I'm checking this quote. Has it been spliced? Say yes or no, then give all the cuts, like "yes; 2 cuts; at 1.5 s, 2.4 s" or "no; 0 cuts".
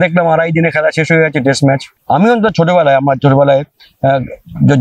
yes; 1 cut; at 1.9 s